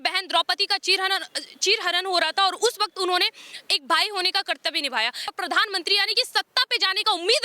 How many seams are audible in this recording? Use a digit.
1